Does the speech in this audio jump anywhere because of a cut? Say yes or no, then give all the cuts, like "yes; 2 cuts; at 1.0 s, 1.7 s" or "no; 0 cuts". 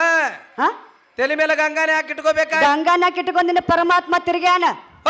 no; 0 cuts